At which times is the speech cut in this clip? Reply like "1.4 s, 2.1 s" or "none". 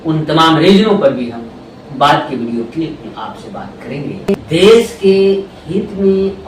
4.3 s